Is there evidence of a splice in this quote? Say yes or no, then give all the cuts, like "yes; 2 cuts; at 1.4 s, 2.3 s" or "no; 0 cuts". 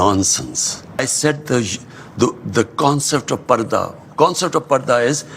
yes; 1 cut; at 1.0 s